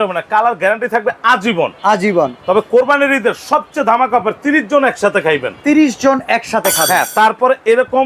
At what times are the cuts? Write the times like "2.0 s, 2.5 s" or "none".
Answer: none